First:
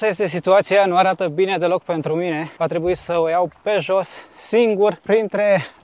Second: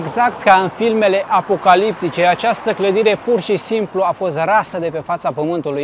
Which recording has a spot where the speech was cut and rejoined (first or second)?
first